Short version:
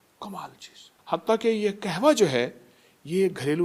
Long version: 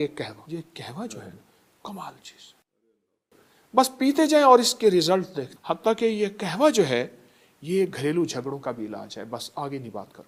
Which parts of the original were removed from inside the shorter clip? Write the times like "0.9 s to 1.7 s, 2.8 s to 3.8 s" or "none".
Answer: 2.6 s to 5.5 s